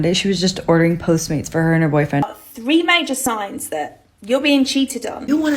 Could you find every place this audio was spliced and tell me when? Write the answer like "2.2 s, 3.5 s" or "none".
2.3 s

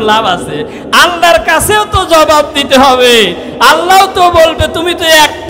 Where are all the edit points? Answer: none

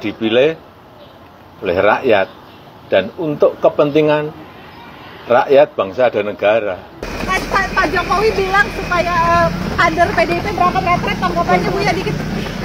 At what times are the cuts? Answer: 7.1 s

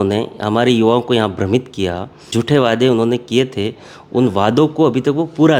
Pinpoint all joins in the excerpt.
2.3 s

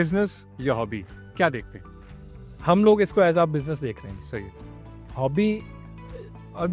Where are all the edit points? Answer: none

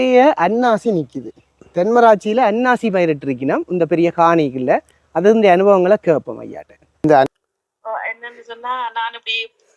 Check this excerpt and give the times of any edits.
7.3 s

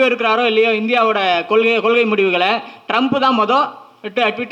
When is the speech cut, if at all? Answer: none

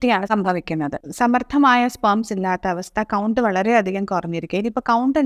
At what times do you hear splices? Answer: 1.0 s

